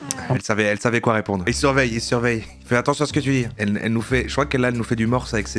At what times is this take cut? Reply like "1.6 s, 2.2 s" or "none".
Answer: 1.5 s, 3.6 s